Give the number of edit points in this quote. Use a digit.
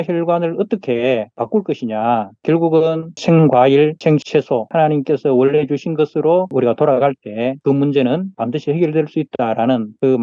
0